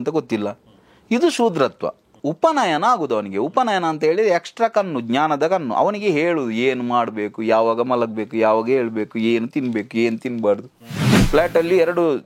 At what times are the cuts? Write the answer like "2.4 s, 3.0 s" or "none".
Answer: 2.1 s, 11.1 s